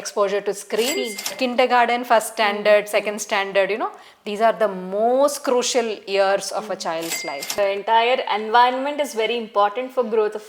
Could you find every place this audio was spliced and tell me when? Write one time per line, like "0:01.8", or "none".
0:01.3
0:07.6

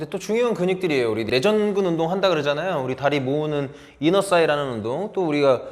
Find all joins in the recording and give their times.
0:01.3

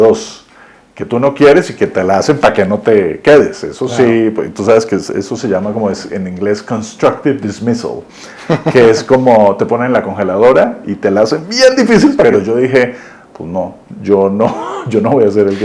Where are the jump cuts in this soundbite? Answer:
0:12.2

